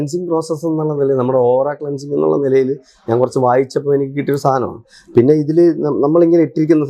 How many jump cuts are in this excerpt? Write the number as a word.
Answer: zero